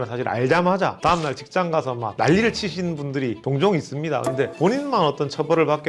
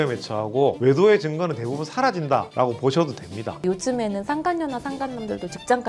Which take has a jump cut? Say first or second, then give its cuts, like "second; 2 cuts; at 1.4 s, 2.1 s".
second; 1 cut; at 3.5 s